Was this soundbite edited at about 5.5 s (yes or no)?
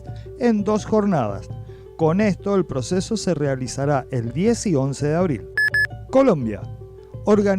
yes